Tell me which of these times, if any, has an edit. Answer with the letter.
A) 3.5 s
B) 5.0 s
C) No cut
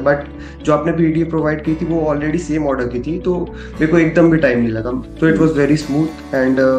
B